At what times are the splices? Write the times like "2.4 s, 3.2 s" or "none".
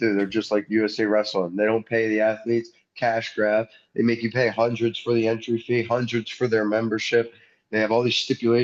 none